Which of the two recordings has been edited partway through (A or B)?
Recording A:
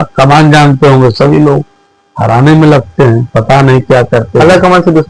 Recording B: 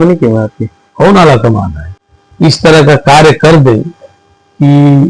B